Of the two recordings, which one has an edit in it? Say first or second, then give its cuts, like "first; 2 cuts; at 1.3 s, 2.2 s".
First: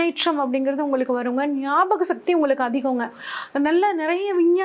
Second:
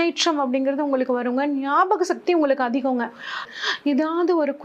second; 1 cut; at 3.5 s